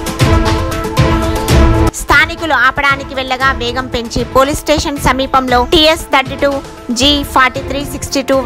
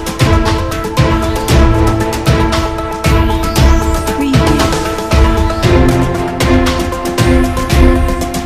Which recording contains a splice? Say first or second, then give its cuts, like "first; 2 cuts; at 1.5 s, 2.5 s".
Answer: first; 1 cut; at 1.9 s